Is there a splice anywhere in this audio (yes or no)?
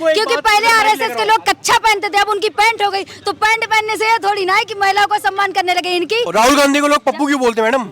yes